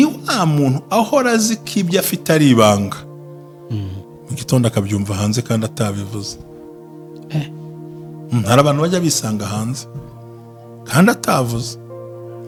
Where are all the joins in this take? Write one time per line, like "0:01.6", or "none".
none